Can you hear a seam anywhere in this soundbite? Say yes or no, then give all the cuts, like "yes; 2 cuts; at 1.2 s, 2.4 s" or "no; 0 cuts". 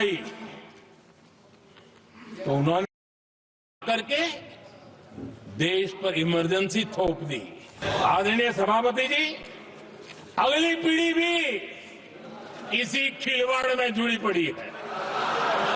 yes; 1 cut; at 7.8 s